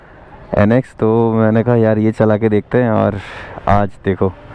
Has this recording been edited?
no; 0 cuts

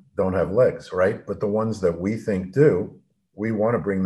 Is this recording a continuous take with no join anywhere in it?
yes; 0 cuts

